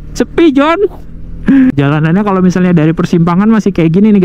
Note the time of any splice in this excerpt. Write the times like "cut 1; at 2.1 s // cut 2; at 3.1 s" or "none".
cut 1; at 1.7 s